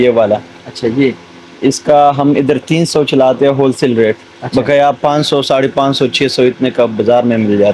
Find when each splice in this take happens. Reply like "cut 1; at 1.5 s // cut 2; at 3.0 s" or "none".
none

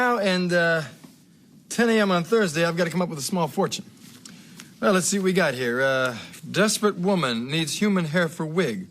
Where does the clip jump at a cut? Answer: cut 1; at 6.3 s

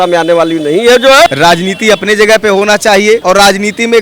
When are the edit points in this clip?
cut 1; at 1.3 s

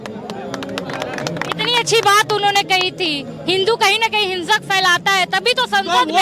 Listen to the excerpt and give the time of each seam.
none

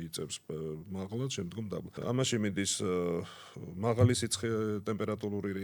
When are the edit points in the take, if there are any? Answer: cut 1; at 2.0 s

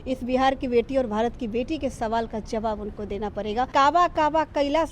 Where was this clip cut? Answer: cut 1; at 3.7 s

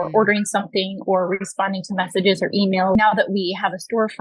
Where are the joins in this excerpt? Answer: cut 1; at 3.0 s

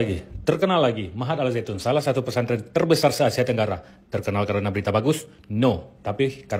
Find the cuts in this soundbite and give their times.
none

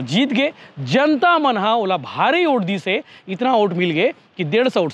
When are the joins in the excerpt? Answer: none

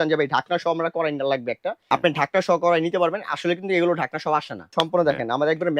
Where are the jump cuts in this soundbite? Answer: cut 1; at 1.8 s // cut 2; at 4.7 s

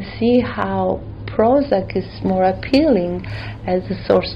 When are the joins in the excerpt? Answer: cut 1; at 2.1 s

